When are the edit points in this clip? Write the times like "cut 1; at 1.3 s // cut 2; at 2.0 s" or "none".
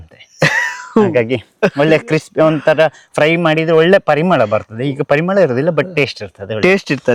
none